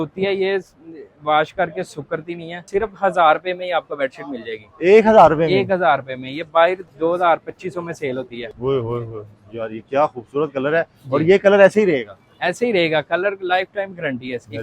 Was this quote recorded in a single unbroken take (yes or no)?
no